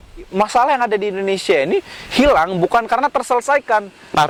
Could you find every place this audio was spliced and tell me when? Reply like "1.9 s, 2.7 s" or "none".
none